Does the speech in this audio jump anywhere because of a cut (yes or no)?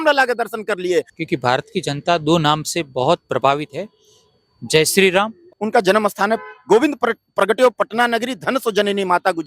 yes